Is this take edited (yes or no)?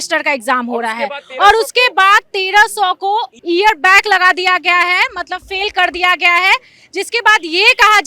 no